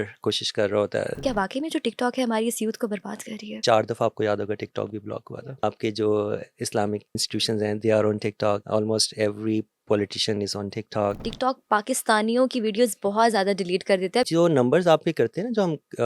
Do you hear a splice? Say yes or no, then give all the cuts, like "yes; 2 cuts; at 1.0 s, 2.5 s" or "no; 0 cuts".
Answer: yes; 7 cuts; at 1.2 s, 3.6 s, 5.3 s, 7.2 s, 8.6 s, 11.3 s, 14.3 s